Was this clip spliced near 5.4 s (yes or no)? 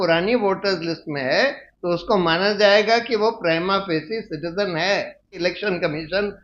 yes